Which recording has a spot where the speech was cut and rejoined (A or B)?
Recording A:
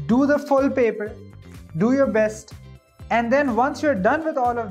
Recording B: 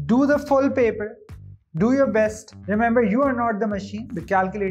B